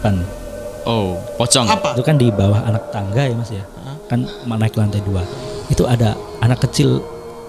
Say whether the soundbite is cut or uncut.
cut